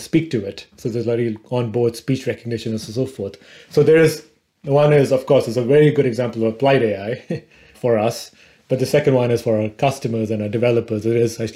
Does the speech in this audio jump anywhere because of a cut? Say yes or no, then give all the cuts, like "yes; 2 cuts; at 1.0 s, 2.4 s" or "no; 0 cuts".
no; 0 cuts